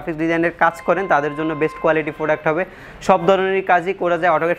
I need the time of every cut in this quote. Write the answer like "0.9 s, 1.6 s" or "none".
none